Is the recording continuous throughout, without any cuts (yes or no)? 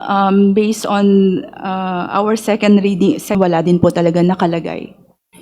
no